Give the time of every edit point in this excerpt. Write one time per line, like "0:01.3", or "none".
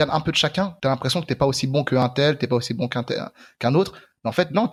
none

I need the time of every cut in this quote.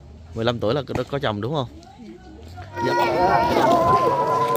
0:02.8

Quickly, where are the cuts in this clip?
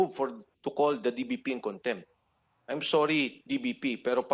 none

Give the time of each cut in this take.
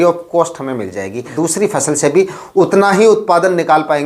0:01.3

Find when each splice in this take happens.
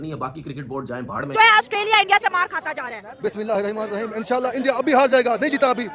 0:01.3

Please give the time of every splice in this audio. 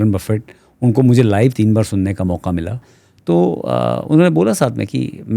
0:02.9

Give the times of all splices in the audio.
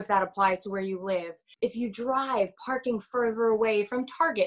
0:01.4

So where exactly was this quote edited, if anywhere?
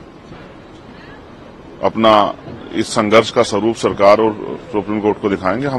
none

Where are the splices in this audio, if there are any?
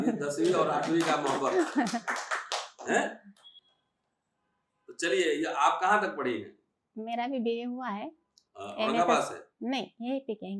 none

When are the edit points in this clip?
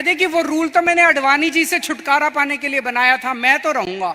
none

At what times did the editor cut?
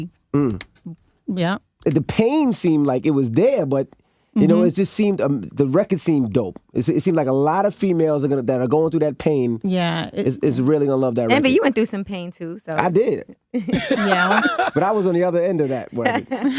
0:03.0

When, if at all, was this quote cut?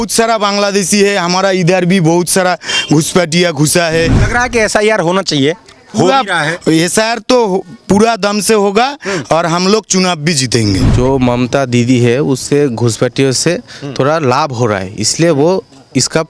0:04.2
0:10.9

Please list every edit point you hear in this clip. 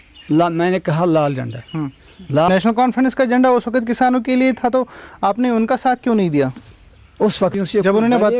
0:02.5
0:07.5

